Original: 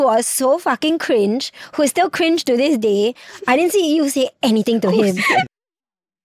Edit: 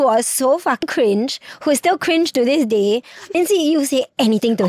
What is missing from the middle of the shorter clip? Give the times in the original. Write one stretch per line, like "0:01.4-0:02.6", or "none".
0:00.8-0:00.9
0:03.5-0:03.6

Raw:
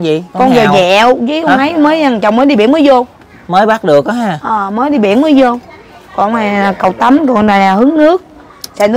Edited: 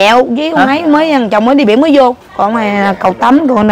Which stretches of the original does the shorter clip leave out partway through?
0:03.2-0:06.0

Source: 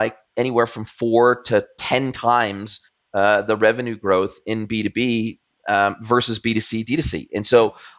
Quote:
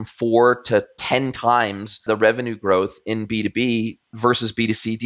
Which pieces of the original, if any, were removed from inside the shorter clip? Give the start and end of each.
0:02.8-0:03.4
0:05.5-0:06.0

